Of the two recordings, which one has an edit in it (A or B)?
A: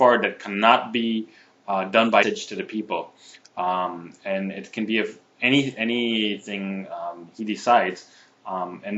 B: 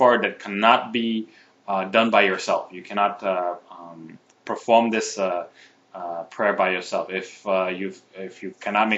B